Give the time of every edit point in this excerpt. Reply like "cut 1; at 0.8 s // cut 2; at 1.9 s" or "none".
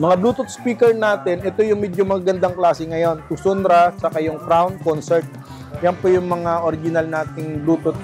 none